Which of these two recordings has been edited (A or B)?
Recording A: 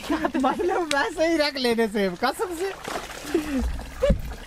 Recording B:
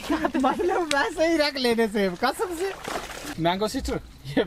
B